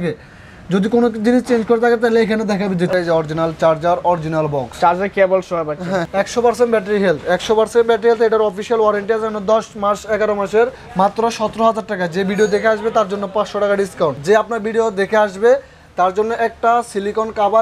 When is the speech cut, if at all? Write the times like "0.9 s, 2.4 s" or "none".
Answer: 2.9 s, 6.1 s, 10.8 s, 14.2 s